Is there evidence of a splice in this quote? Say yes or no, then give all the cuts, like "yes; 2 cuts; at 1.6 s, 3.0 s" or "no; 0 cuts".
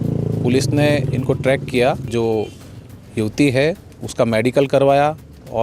yes; 1 cut; at 2.0 s